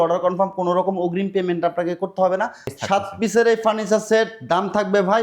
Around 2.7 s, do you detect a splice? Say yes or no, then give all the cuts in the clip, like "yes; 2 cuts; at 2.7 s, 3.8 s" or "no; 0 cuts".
yes; 1 cut; at 2.7 s